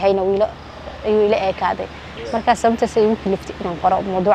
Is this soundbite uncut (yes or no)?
yes